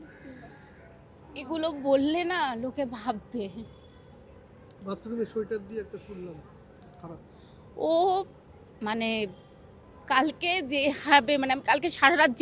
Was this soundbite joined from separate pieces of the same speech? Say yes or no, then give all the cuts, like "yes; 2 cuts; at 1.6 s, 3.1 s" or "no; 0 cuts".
no; 0 cuts